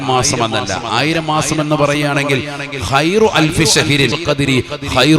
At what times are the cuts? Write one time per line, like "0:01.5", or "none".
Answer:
0:04.2

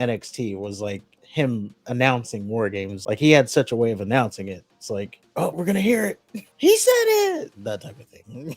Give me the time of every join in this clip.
0:02.9
0:05.5
0:07.5

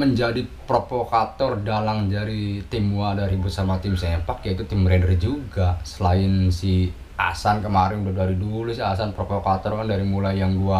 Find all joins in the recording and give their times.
none

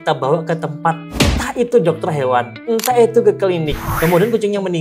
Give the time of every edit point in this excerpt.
0:01.1
0:03.8

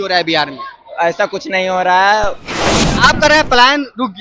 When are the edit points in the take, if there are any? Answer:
0:02.8

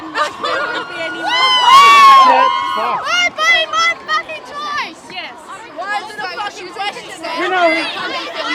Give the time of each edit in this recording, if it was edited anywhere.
none

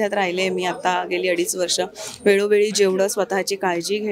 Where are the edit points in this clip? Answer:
none

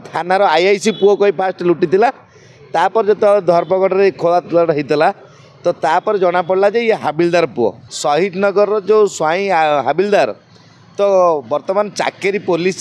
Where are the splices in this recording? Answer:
0:07.9

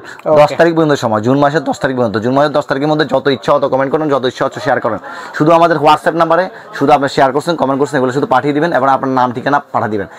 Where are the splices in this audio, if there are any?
none

